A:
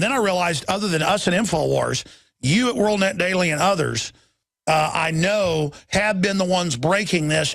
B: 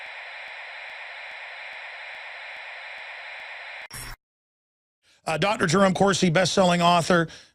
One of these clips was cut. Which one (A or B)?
A